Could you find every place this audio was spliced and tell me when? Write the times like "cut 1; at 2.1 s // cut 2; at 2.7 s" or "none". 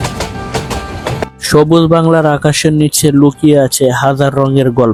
none